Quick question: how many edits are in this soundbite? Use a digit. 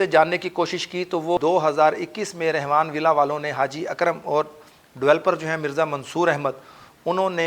1